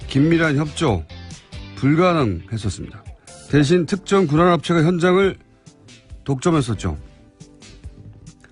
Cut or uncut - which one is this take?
cut